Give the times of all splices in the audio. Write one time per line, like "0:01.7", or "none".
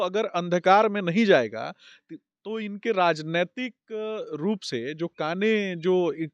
none